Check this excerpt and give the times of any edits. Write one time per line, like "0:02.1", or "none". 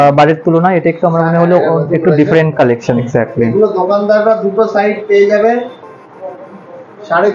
0:03.1